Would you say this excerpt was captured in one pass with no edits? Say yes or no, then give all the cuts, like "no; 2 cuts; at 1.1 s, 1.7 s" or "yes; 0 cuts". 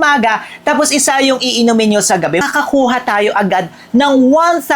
no; 1 cut; at 2.4 s